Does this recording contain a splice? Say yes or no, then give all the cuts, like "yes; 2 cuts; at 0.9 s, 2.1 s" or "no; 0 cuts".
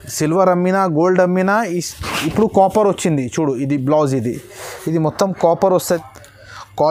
yes; 1 cut; at 5.8 s